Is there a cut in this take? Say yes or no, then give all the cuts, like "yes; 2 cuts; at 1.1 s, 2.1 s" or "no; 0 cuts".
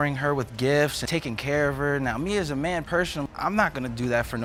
no; 0 cuts